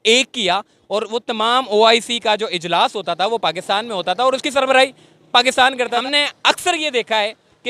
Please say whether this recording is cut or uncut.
cut